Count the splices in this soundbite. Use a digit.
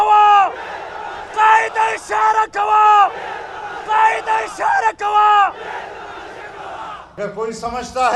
1